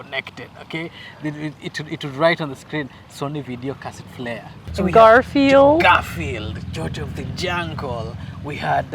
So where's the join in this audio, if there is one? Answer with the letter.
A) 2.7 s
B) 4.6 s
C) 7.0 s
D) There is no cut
B